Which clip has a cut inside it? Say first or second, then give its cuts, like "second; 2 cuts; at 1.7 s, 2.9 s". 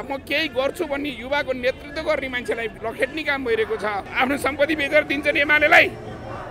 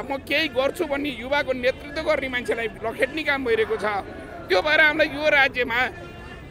first; 1 cut; at 4.1 s